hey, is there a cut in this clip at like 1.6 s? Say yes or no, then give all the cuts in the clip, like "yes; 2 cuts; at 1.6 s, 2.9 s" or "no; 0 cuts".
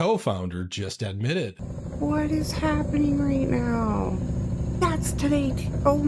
yes; 1 cut; at 1.6 s